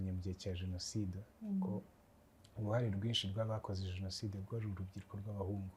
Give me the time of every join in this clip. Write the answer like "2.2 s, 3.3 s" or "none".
none